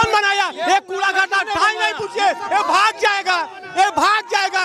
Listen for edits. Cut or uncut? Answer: uncut